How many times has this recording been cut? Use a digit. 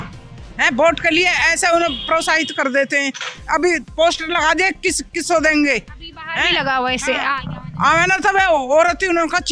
0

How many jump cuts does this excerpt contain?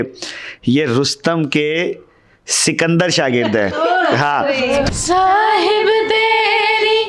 1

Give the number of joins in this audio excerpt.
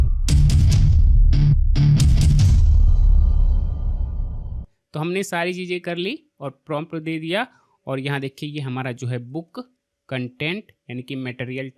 1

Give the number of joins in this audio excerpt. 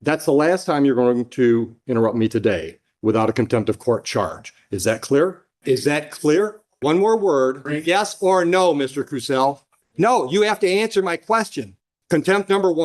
3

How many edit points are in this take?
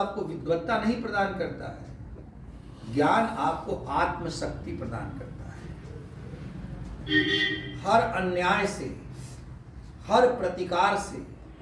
0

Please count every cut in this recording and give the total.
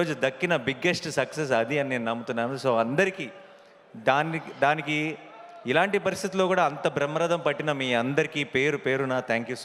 0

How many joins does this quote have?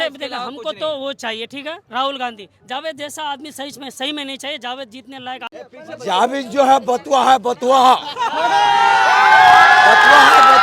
1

